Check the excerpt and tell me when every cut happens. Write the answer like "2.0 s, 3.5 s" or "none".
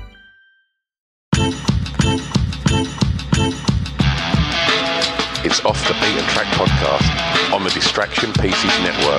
1.3 s